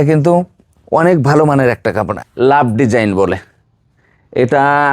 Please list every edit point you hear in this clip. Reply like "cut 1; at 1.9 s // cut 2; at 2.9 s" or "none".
cut 1; at 2.2 s